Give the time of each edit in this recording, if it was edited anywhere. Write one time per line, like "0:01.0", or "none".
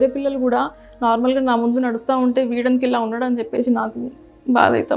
none